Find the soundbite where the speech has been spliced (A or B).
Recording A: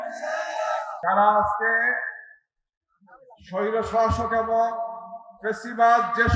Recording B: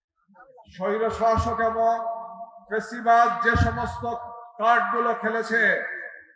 A